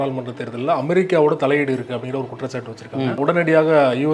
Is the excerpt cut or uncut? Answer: cut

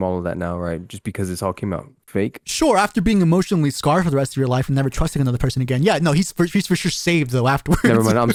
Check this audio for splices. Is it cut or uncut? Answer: uncut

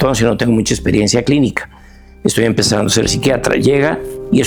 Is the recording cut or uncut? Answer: uncut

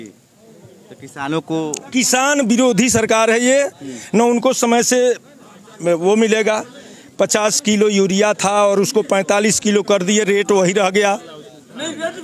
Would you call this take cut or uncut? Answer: uncut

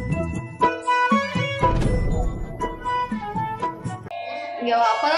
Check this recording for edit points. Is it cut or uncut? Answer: cut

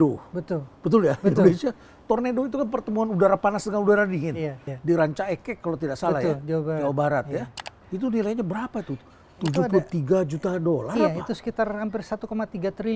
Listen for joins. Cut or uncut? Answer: uncut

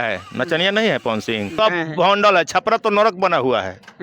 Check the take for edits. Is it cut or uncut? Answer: cut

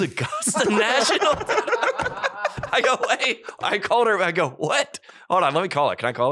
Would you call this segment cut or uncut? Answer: uncut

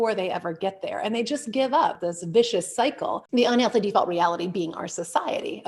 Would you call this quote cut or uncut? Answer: cut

